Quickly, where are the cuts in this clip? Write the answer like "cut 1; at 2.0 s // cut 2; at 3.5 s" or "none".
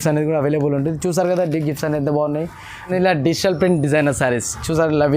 cut 1; at 2.9 s